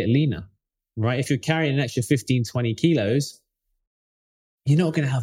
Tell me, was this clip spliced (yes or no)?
no